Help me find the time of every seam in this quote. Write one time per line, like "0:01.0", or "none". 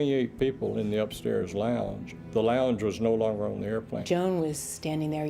0:04.0